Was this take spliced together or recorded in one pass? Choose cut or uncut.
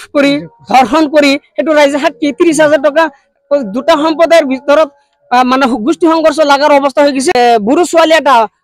cut